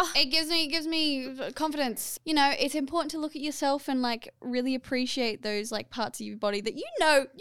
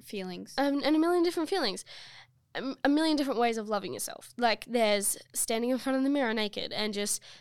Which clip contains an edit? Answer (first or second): first